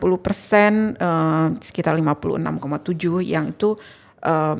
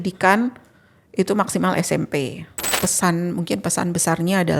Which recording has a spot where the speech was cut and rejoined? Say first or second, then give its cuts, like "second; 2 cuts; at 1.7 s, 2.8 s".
second; 1 cut; at 2.8 s